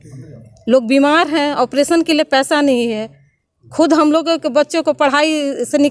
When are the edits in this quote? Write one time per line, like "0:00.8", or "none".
none